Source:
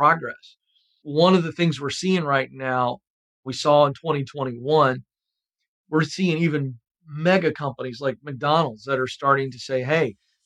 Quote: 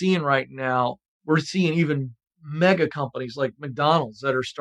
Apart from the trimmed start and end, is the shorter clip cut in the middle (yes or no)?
yes